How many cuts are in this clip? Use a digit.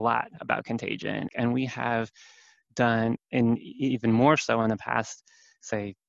1